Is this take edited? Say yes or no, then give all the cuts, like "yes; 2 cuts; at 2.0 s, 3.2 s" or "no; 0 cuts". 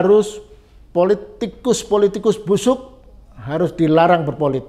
no; 0 cuts